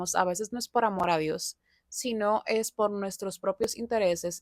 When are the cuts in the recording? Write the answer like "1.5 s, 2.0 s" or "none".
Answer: none